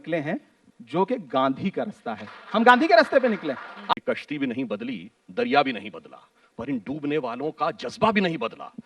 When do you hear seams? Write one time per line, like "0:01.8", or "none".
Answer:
0:03.9